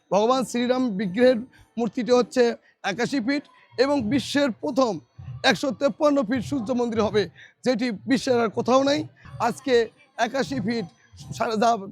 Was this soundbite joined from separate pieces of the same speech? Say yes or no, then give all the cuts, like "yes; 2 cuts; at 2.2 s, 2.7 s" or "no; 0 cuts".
yes; 1 cut; at 9.2 s